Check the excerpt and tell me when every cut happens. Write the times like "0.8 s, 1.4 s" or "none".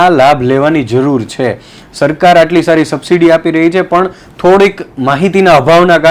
none